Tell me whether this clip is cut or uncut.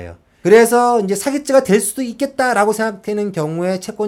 uncut